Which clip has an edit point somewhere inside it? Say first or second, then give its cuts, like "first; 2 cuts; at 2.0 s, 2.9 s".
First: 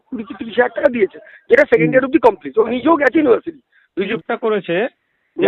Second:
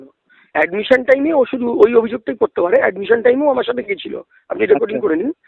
first; 1 cut; at 4.1 s